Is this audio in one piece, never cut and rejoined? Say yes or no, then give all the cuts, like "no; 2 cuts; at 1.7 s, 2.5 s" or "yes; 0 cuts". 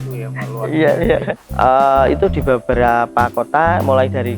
no; 1 cut; at 1.4 s